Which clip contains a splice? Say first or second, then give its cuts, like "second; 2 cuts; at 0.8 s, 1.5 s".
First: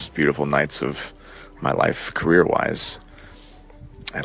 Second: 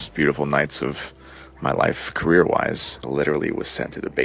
second; 1 cut; at 2.9 s